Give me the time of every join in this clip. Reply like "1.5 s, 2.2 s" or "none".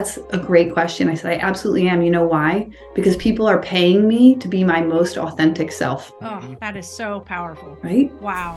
6.1 s, 7.7 s